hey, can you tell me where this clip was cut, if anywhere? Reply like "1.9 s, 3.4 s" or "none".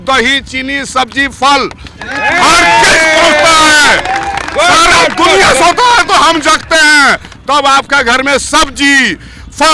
none